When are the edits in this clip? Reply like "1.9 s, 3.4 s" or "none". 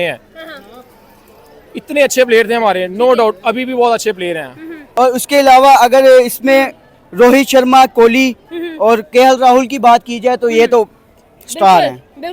4.8 s